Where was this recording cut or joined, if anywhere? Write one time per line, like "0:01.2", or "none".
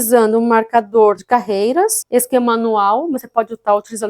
0:01.5